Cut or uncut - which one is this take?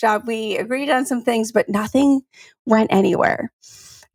uncut